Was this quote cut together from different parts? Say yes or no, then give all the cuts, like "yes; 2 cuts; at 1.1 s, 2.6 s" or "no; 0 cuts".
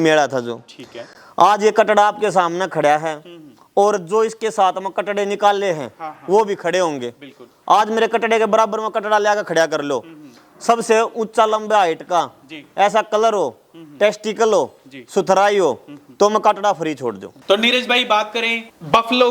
yes; 1 cut; at 17.3 s